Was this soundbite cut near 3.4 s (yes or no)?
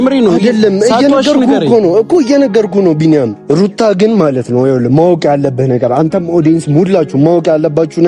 yes